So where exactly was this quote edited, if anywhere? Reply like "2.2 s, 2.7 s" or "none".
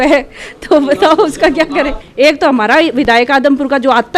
1.9 s